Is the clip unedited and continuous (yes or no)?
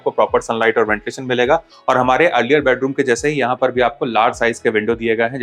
no